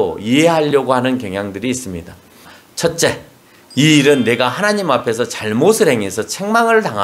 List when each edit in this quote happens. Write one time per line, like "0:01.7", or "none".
0:02.6